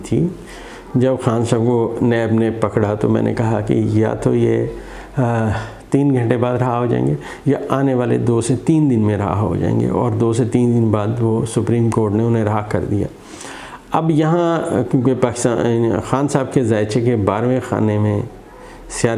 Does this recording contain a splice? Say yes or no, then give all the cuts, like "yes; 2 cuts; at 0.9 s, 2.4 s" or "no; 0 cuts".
no; 0 cuts